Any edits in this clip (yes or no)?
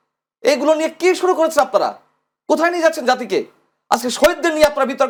no